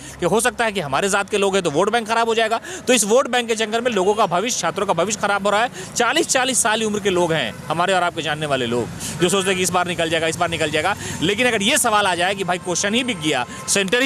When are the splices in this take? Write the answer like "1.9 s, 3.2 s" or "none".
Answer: none